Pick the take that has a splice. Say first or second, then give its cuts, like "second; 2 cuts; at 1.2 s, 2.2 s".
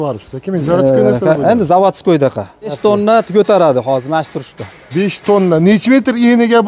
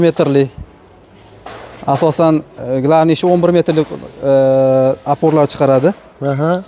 first; 1 cut; at 2.8 s